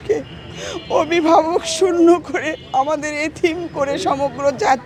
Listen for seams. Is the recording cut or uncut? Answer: uncut